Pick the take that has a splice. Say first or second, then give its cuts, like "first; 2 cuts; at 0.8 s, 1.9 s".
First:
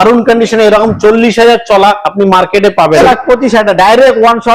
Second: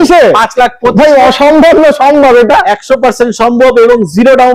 first; 1 cut; at 3.0 s